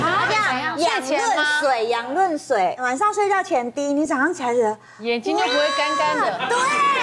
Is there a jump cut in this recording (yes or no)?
no